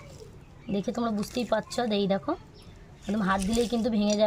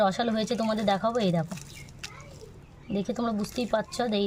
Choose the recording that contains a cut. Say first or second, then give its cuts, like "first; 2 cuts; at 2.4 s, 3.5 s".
first; 1 cut; at 3.2 s